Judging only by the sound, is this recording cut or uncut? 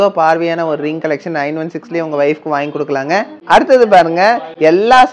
uncut